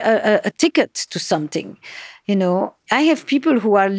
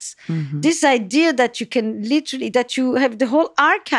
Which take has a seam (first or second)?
first